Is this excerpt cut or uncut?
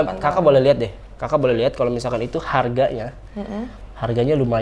uncut